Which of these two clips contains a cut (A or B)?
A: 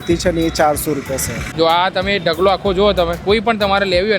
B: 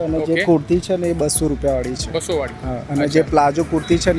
A